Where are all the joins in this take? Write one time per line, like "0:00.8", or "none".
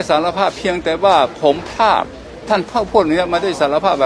none